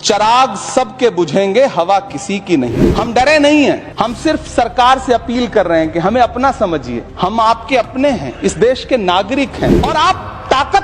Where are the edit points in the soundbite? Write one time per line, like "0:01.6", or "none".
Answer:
0:02.7
0:03.9
0:07.0
0:09.8

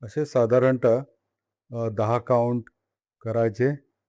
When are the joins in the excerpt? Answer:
none

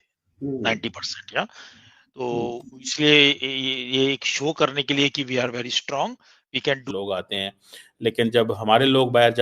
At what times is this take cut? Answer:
0:06.9

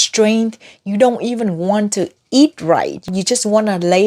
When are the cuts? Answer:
0:03.1

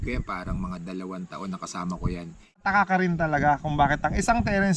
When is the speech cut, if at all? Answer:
0:02.6

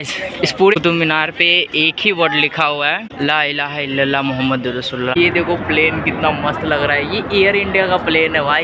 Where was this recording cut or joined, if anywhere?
0:03.1
0:05.1

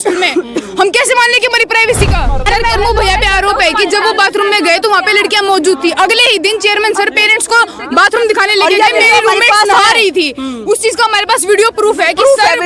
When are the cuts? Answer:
0:02.5

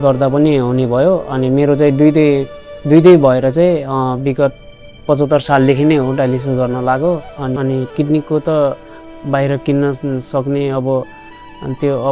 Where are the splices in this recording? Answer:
0:07.5

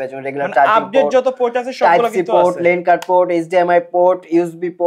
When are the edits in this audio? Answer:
none

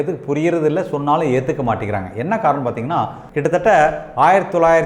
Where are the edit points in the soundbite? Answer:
0:03.2

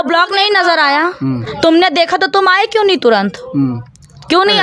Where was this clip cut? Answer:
none

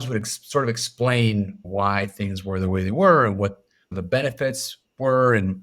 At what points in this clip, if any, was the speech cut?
0:01.6
0:04.0

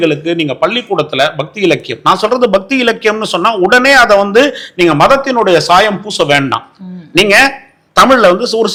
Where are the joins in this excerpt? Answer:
none

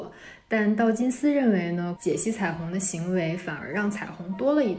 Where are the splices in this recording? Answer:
0:01.9

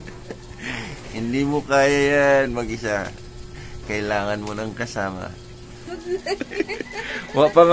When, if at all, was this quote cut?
0:05.9

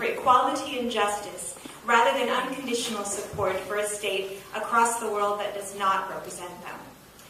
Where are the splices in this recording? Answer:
none

